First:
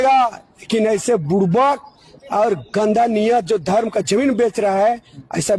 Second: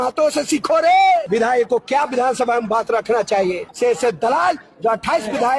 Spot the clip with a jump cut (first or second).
second